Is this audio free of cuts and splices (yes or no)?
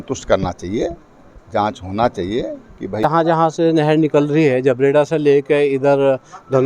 no